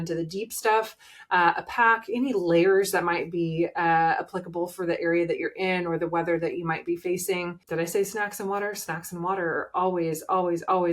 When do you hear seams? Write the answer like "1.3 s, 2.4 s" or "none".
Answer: 7.6 s